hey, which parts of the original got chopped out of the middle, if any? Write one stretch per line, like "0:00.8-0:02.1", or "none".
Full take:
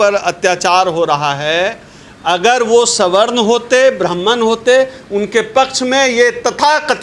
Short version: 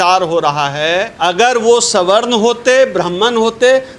0:01.8-0:02.2